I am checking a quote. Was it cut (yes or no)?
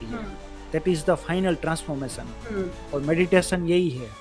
no